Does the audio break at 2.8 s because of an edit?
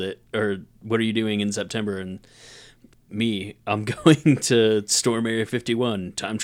yes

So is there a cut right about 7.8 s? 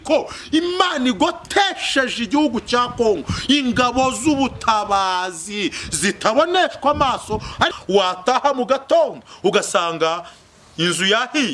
yes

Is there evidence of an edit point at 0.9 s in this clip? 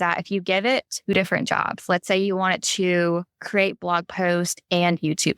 yes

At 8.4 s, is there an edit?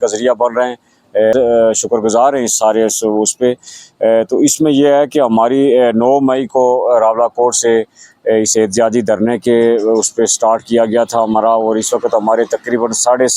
no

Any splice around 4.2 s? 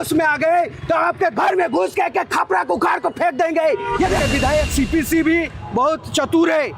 yes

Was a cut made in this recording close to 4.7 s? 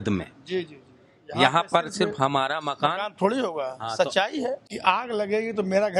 yes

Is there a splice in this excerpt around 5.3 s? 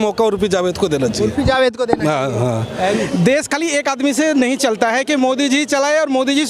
no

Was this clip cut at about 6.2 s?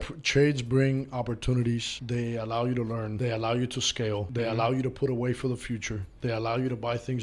no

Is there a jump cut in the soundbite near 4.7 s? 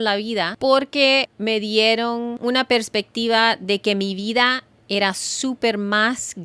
no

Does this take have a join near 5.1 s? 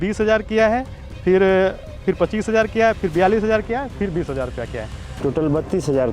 yes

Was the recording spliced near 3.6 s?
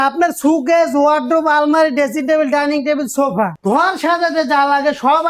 yes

